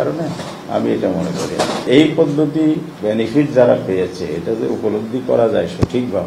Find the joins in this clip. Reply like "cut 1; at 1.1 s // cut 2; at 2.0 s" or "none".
cut 1; at 1.9 s